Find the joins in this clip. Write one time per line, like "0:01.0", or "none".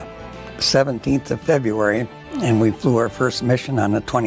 none